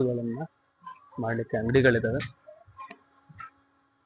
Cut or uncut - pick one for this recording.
uncut